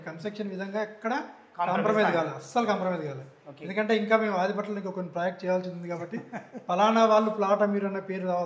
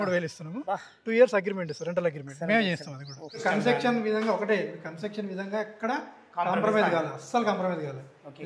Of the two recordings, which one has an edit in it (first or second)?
second